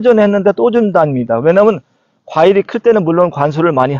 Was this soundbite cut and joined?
no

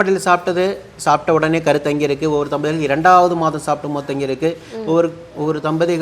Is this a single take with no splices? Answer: yes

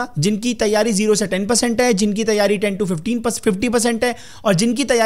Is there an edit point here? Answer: no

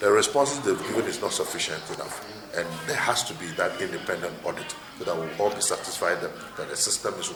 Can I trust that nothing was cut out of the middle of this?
yes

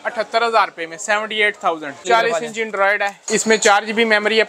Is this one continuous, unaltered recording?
no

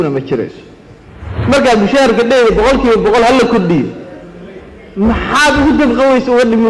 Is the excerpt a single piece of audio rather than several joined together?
no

